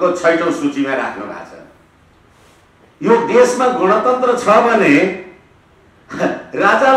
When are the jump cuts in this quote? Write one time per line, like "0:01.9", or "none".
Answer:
none